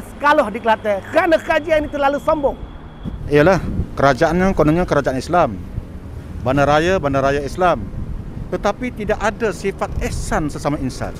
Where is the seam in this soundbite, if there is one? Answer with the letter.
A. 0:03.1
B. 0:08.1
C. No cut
A